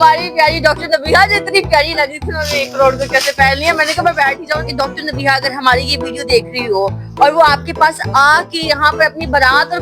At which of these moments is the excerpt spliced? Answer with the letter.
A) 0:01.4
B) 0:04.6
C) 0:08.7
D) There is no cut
B